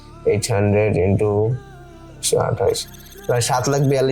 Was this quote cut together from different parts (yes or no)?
no